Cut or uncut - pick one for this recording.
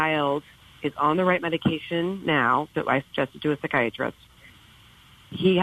uncut